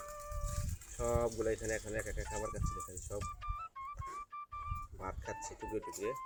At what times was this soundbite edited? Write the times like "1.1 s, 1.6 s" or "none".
none